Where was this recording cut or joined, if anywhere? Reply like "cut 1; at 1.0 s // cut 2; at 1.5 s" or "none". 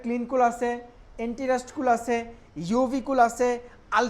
none